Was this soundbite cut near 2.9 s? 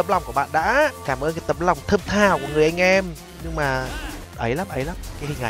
no; 2 cuts; at 1.0 s, 4.2 s

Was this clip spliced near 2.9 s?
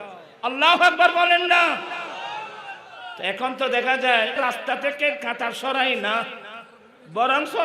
no; 1 cut; at 4.4 s

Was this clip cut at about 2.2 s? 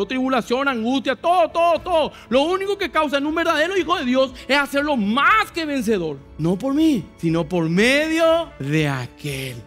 no; 3 cuts; at 6.3 s, 7.1 s, 8.6 s

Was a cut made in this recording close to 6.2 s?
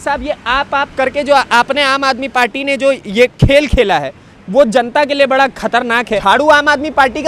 yes; 1 cut; at 6.2 s

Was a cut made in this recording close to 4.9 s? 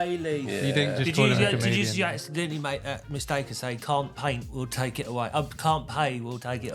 no; 0 cuts

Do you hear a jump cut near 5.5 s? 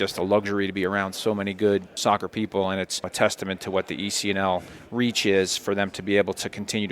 no; 2 cuts; at 1.9 s, 3.1 s

